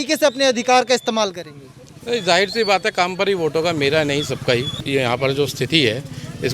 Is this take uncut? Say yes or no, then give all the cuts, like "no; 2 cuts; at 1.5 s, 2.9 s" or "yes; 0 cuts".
no; 1 cut; at 4.8 s